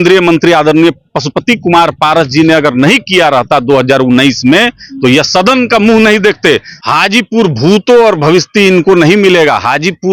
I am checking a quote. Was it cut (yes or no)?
yes